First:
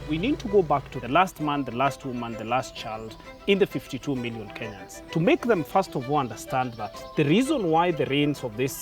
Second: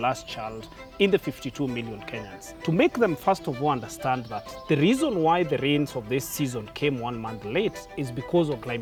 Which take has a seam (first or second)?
first